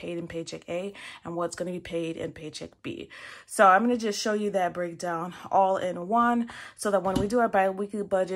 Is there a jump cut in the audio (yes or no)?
no